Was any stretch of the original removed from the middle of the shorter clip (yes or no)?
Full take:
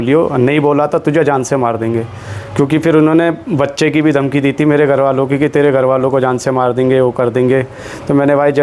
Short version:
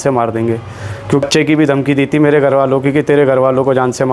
yes